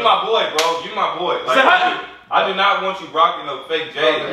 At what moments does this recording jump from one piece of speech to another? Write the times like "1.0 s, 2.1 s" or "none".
none